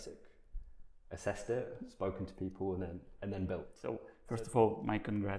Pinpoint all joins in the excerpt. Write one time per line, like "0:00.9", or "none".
0:04.1